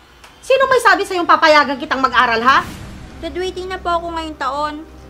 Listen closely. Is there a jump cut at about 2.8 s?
yes; 1 cut; at 2.8 s

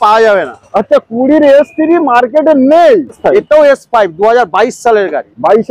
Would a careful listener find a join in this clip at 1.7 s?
no; 1 cut; at 3.2 s

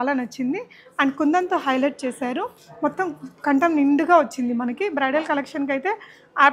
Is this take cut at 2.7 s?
no; 0 cuts

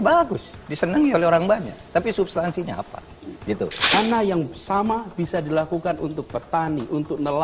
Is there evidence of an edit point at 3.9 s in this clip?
yes; 1 cut; at 3.9 s

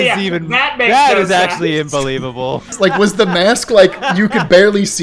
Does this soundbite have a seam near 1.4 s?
no; 1 cut; at 2.8 s

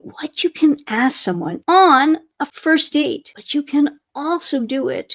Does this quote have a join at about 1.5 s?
yes; 2 cuts; at 1.5 s, 2.8 s

